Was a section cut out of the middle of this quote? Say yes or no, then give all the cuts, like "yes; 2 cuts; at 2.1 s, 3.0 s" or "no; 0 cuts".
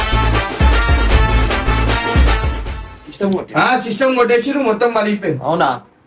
yes; 1 cut; at 2.6 s